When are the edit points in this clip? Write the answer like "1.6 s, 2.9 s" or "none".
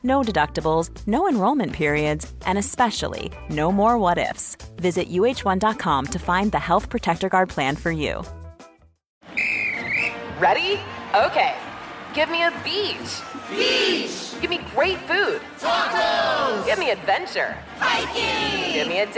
9.2 s